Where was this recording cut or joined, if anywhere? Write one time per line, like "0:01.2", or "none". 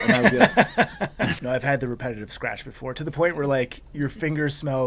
0:01.4

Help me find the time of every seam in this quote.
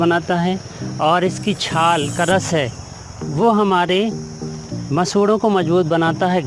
none

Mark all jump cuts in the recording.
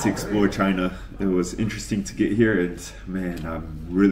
none

